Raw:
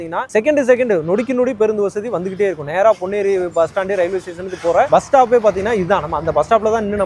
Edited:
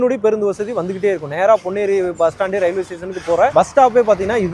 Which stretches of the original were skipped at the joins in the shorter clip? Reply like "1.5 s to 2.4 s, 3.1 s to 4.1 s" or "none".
none